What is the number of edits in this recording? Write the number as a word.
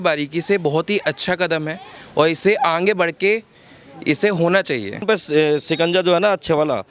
one